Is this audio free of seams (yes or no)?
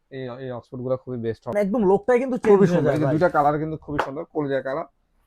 no